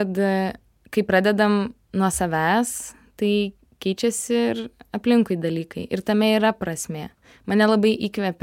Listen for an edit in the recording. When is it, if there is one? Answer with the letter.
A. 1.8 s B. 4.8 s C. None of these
A